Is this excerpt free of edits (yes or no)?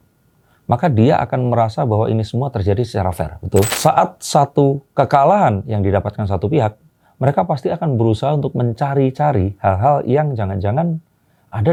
yes